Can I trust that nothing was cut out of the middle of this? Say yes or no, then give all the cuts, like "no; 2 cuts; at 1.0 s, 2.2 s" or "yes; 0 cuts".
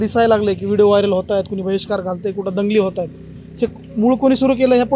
yes; 0 cuts